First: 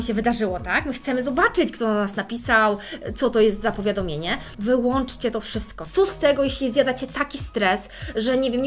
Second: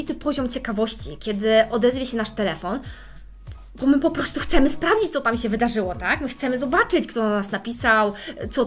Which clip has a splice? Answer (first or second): first